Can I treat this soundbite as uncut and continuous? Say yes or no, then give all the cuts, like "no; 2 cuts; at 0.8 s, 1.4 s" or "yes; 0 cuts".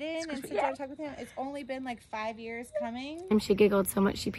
no; 1 cut; at 3.3 s